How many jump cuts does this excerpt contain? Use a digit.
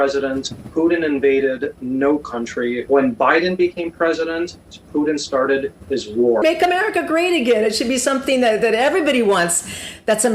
2